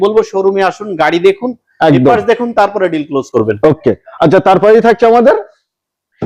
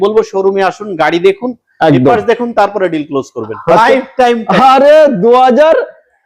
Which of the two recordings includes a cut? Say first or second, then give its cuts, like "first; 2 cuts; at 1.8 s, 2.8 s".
second; 1 cut; at 3.4 s